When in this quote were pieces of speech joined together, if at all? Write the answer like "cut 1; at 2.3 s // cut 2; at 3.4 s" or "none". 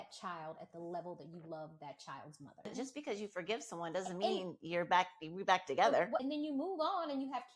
cut 1; at 2.7 s // cut 2; at 6.2 s